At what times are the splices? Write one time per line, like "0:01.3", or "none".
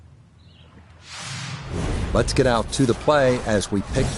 0:01.1